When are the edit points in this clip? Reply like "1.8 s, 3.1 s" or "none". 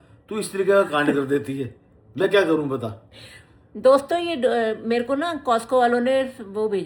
none